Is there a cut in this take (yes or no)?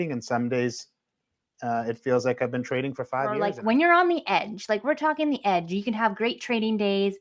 yes